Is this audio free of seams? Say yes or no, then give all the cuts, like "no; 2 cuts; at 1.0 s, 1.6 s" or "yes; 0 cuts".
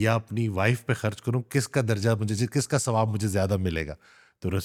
yes; 0 cuts